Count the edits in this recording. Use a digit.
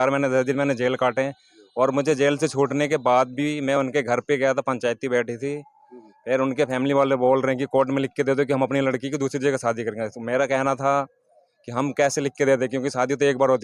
0